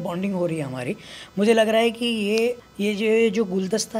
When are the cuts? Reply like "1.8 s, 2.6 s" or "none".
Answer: 2.7 s